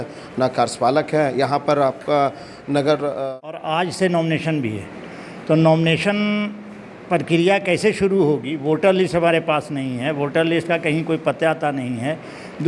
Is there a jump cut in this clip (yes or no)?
yes